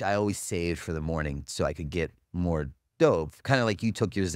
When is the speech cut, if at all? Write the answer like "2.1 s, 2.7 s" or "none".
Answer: none